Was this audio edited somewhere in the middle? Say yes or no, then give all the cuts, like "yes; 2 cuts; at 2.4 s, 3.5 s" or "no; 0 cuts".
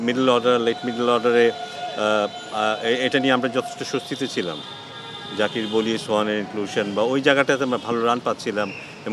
no; 0 cuts